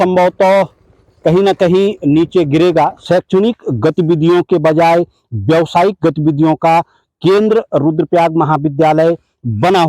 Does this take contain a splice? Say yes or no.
yes